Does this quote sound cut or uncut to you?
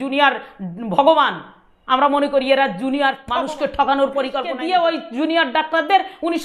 cut